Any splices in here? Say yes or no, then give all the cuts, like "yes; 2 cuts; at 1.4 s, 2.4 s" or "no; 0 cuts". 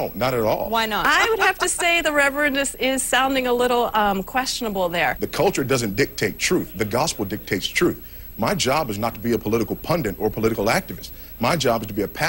yes; 2 cuts; at 1.0 s, 5.2 s